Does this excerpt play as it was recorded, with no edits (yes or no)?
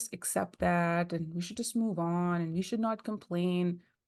yes